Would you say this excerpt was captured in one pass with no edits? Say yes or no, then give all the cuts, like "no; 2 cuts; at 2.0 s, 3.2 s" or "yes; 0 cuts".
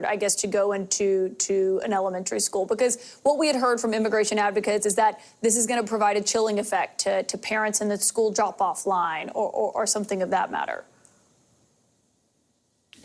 yes; 0 cuts